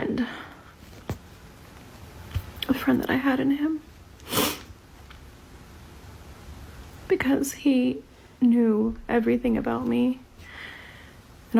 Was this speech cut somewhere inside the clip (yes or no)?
no